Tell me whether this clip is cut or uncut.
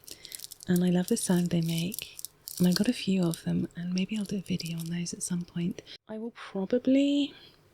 cut